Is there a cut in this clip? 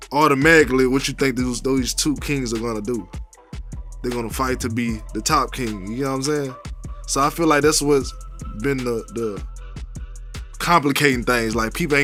no; 0 cuts

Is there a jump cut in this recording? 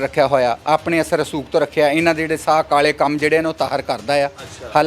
no; 0 cuts

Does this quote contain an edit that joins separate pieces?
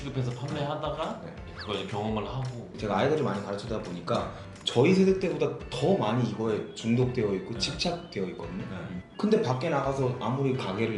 yes; 2 cuts; at 1.4 s, 2.7 s

